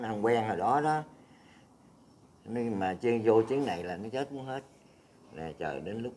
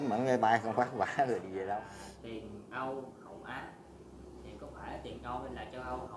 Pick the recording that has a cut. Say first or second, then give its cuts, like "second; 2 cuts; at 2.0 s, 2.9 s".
second; 1 cut; at 1.9 s